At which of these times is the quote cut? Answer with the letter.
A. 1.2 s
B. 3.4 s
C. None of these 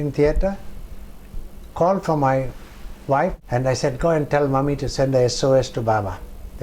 B